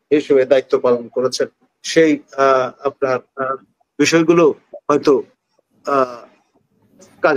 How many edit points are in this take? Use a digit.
0